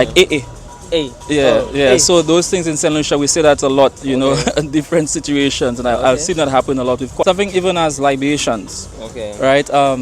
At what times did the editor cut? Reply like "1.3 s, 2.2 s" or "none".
7.2 s